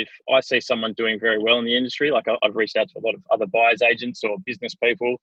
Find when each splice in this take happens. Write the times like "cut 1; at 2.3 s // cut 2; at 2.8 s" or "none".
none